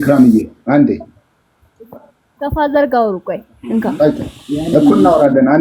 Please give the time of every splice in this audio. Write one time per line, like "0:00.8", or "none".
none